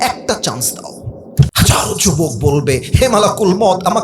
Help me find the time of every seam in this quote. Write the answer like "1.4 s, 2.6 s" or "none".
1.5 s